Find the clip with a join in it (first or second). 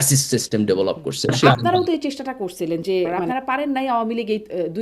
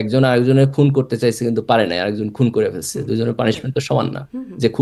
first